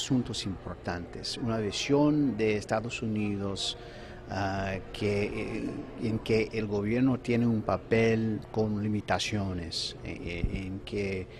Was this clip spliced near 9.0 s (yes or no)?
yes